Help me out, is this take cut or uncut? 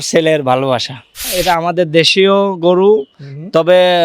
cut